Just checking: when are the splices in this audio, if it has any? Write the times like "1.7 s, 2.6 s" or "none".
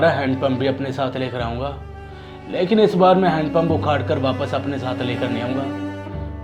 none